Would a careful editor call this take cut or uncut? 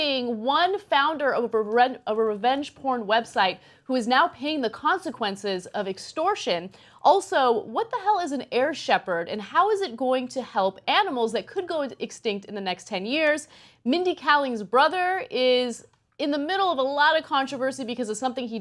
cut